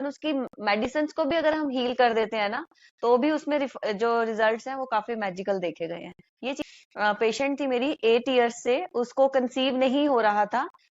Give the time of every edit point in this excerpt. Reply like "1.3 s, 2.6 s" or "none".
6.6 s